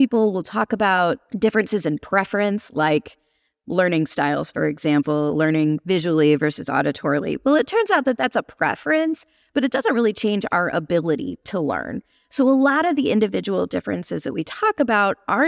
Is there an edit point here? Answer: yes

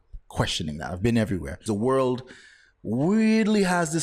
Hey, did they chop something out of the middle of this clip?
yes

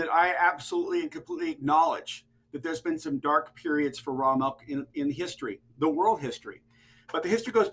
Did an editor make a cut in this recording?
no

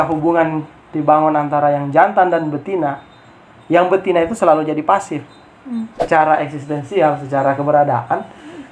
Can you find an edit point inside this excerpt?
yes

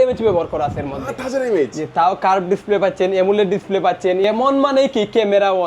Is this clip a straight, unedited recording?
no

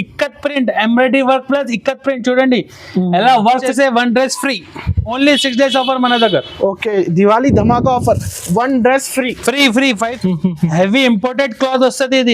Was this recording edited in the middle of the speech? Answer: yes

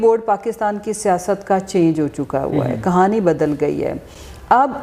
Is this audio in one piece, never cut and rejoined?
yes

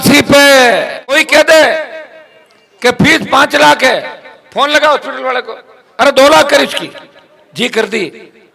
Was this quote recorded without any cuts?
no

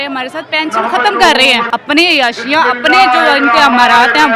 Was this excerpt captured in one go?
no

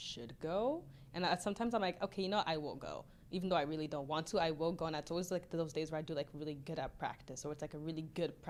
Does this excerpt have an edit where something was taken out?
no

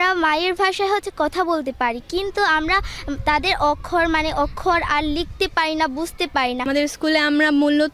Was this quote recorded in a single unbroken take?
yes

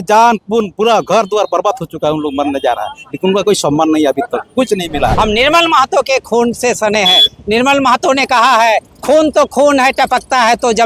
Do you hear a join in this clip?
yes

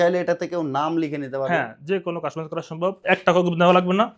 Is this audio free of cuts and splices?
no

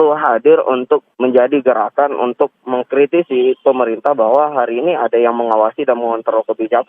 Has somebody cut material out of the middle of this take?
yes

